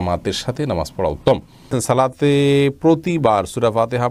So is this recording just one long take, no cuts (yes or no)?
no